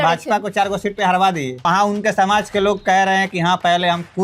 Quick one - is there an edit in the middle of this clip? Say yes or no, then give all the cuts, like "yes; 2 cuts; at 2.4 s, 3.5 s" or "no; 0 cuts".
yes; 1 cut; at 1.7 s